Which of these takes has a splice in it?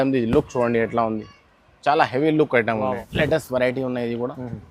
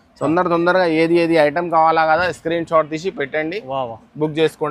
first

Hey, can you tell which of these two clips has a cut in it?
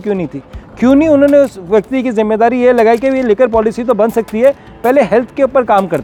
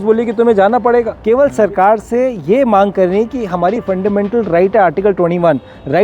second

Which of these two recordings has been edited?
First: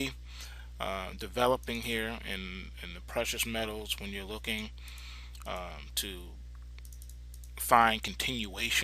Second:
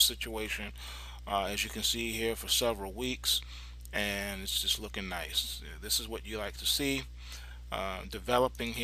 first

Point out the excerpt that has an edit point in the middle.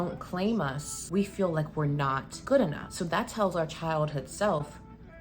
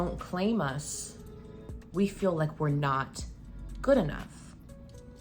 first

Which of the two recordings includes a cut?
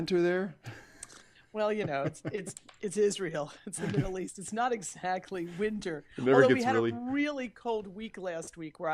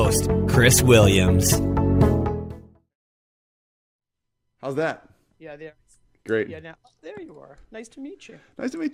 first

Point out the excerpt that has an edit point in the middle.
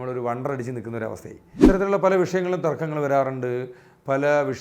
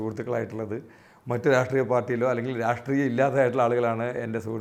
first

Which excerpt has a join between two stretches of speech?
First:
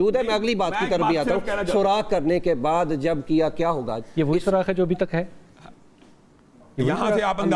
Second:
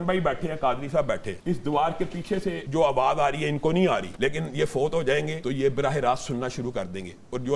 second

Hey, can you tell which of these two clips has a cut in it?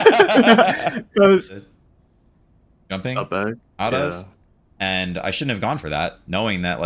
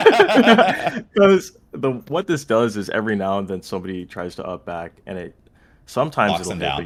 first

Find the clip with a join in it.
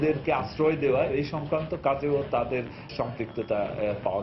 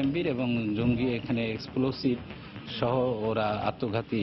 first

